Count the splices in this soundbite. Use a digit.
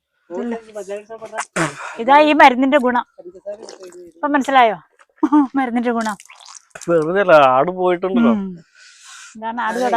0